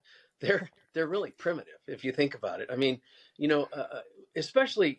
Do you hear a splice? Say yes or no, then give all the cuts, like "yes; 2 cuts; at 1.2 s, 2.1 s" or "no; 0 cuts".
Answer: no; 0 cuts